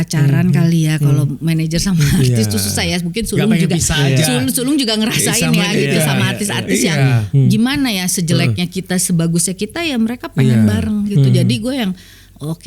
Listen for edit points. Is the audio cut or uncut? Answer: uncut